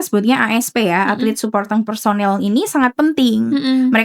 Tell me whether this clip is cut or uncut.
uncut